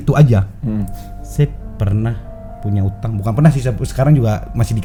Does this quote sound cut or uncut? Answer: uncut